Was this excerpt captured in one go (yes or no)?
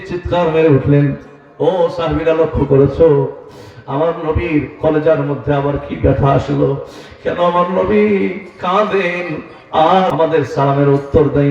no